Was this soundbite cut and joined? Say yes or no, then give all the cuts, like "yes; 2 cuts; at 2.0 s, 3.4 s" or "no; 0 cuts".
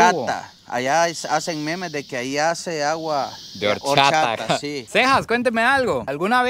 yes; 1 cut; at 4.8 s